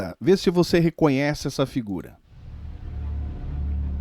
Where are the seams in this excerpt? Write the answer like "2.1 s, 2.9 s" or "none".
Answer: 2.4 s